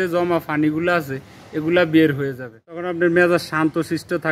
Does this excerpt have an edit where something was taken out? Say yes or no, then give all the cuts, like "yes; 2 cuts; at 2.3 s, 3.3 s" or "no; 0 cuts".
yes; 1 cut; at 2.9 s